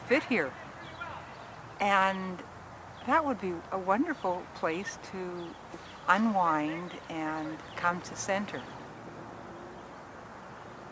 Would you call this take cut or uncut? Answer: uncut